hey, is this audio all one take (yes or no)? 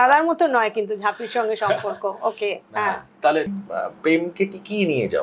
no